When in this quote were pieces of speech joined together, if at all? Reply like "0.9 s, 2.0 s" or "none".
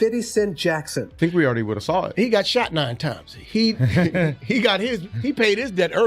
1.0 s